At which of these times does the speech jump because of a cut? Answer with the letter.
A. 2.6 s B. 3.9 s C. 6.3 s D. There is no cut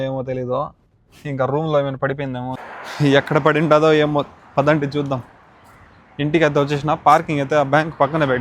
A